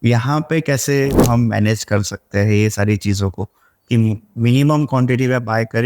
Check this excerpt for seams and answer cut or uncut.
cut